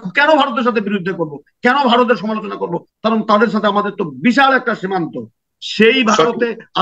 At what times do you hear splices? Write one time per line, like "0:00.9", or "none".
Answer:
0:05.4